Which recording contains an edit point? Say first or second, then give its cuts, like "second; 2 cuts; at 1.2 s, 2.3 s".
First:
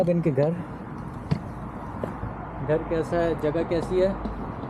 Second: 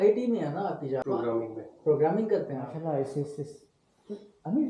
second; 2 cuts; at 1.0 s, 2.7 s